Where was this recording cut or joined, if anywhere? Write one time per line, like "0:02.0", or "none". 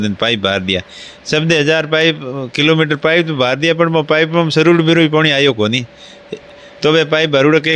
none